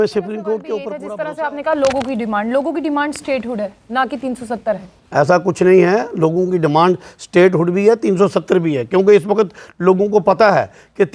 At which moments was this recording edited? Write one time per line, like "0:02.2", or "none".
0:01.0